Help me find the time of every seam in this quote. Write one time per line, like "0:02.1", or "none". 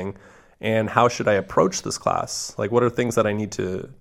none